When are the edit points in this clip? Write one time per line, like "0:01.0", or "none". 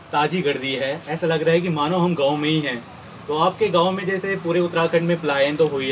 none